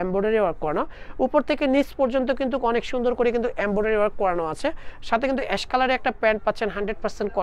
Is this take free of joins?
yes; 0 cuts

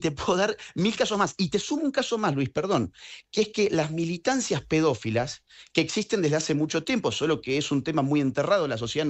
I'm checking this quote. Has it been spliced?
no; 0 cuts

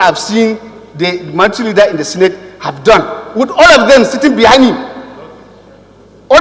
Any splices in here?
no; 0 cuts

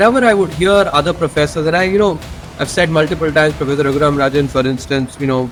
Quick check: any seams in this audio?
no; 0 cuts

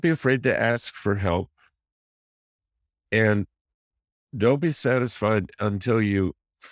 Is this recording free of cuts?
yes; 0 cuts

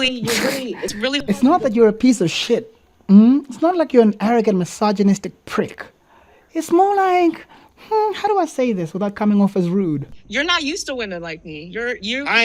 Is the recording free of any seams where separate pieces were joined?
no; 1 cut; at 10.1 s

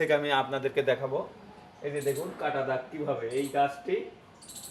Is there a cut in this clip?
no; 0 cuts

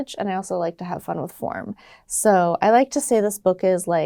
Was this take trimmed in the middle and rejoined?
no; 0 cuts

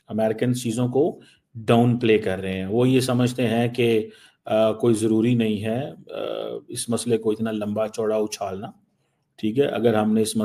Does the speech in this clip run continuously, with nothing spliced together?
yes; 0 cuts

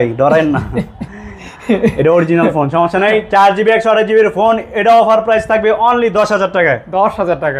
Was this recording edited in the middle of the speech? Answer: no; 0 cuts

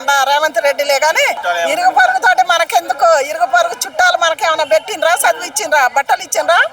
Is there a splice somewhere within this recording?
yes; 1 cut; at 1.4 s

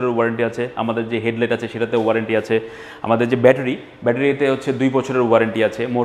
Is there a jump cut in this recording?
no; 0 cuts

